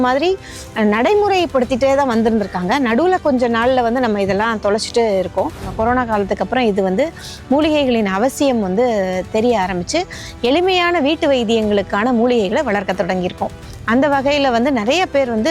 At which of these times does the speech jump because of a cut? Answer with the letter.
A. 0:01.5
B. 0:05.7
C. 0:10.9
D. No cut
B